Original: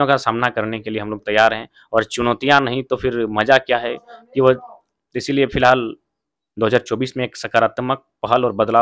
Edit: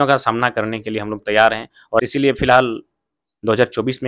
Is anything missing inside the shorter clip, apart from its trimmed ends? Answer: yes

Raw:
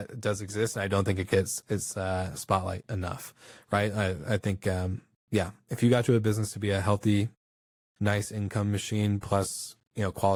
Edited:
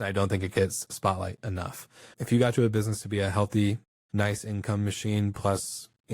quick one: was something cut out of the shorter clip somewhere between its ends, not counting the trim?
yes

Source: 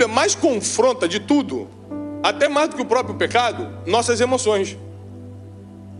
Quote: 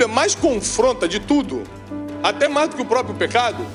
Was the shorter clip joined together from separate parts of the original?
no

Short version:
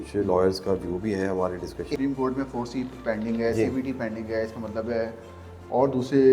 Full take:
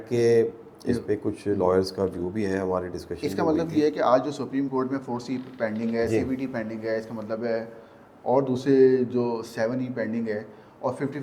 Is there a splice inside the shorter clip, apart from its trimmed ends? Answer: yes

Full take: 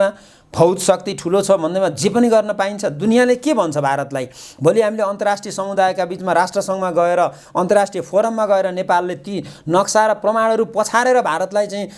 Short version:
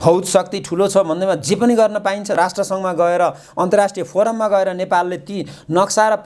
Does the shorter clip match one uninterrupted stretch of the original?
no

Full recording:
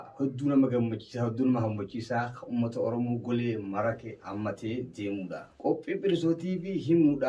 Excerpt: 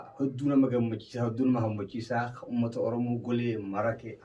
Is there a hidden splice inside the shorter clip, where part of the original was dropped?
no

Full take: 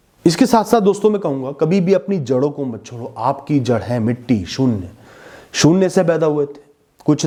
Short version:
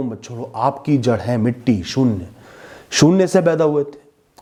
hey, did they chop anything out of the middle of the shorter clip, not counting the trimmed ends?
no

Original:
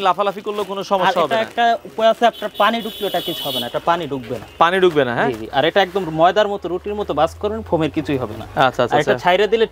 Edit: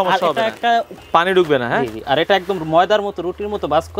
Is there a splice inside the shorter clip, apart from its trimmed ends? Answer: yes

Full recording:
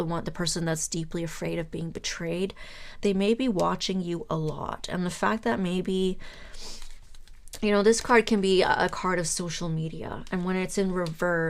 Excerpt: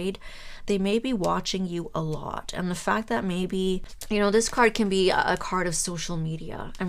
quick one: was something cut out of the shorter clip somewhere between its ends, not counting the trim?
yes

